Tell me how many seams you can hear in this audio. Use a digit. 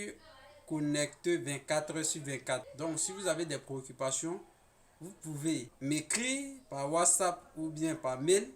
2